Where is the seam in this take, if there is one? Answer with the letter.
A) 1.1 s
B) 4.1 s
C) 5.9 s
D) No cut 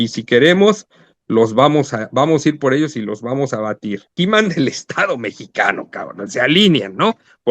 B